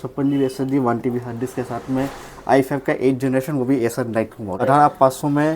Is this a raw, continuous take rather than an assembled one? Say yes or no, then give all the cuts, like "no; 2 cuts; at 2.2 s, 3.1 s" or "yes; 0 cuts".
no; 1 cut; at 4.6 s